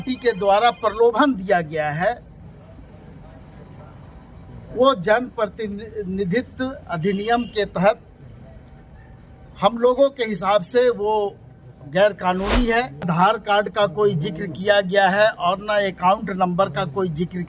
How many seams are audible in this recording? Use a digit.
1